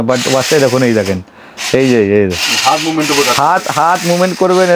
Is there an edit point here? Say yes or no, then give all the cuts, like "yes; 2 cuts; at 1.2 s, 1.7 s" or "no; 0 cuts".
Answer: no; 0 cuts